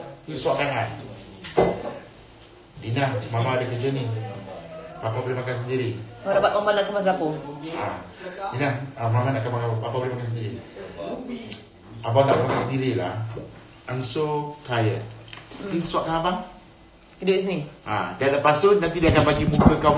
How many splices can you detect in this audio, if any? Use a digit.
1